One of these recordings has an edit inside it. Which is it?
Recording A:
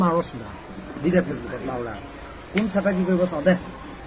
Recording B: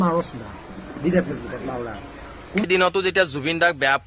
B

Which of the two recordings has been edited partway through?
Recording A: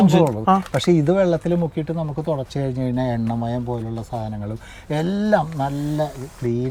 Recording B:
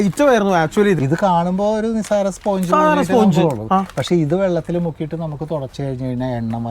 B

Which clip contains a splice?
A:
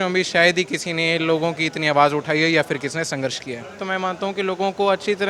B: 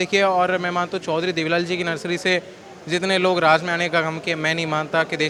A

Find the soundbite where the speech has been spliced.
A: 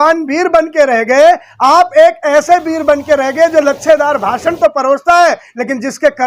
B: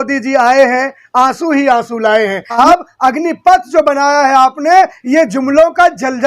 B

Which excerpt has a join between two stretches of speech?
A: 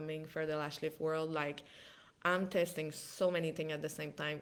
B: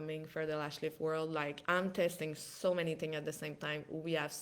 B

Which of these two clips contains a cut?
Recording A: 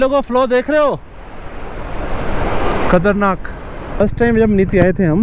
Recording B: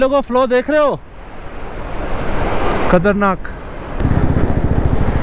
B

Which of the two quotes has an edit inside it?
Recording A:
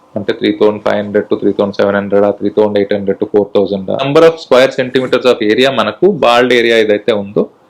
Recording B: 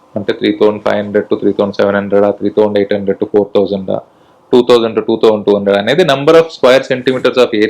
A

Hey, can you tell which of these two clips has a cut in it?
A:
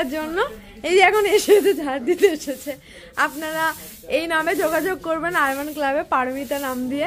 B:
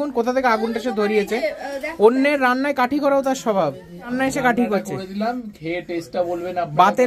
B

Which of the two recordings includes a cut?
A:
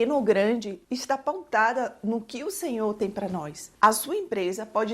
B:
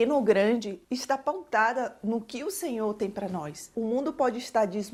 A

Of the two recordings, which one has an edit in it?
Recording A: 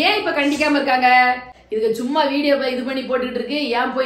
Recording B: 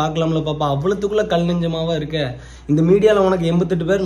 A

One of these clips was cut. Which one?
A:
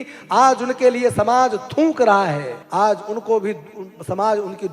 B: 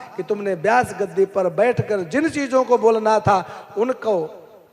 A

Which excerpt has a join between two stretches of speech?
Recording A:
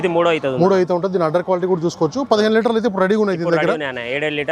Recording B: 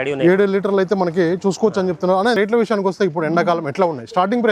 B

